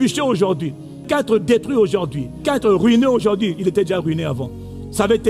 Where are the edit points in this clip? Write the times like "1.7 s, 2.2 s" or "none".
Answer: 1.1 s, 2.4 s